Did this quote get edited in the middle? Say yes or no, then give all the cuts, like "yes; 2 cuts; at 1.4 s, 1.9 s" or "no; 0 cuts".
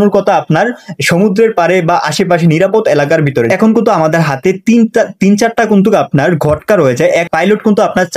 yes; 1 cut; at 7.3 s